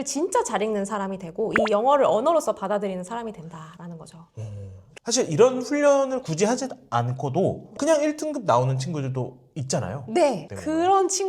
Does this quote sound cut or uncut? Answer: uncut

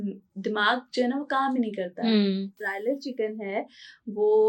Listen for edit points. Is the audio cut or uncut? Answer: cut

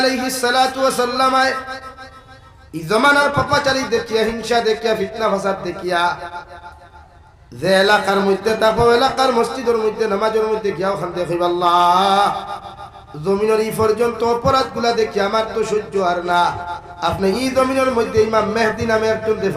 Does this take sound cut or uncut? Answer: uncut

